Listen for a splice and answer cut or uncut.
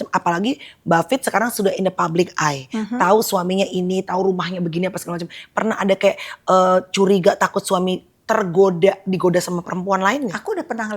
uncut